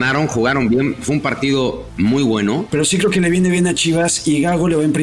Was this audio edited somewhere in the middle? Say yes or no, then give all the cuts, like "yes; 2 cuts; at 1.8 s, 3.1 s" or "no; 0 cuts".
yes; 2 cuts; at 1.8 s, 2.7 s